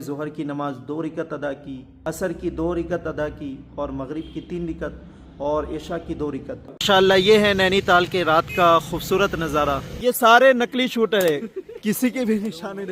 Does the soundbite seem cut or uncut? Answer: cut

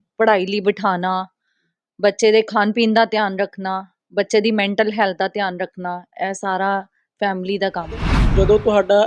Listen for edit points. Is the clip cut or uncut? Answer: cut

